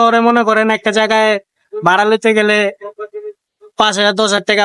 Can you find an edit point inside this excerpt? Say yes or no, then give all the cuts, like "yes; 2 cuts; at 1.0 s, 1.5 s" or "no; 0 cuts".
no; 0 cuts